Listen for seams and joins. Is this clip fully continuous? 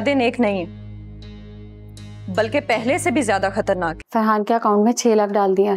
no; 1 cut; at 4.0 s

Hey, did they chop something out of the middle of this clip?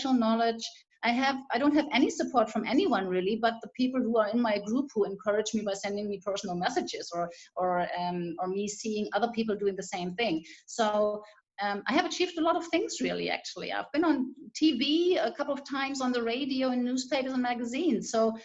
yes; 1 cut; at 11.5 s

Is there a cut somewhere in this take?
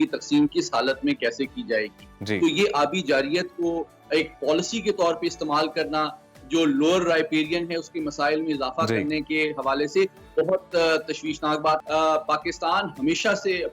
yes; 1 cut; at 11.8 s

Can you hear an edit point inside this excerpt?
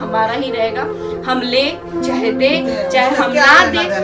no; 0 cuts

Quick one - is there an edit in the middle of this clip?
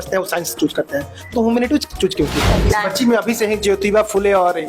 yes; 1 cut; at 2.6 s

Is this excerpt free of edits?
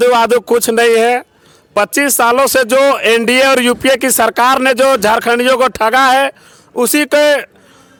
yes; 0 cuts

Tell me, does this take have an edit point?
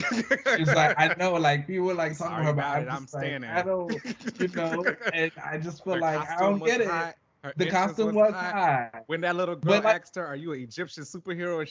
no; 0 cuts

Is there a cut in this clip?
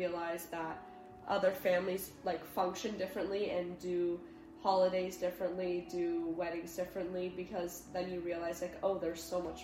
no; 0 cuts

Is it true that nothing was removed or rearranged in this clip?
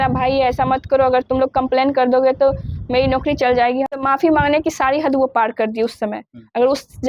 yes; 0 cuts

